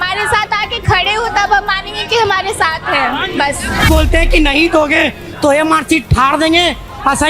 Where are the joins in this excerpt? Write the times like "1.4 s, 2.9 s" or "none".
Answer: 3.9 s